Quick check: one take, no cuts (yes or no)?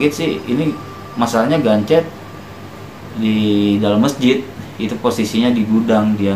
yes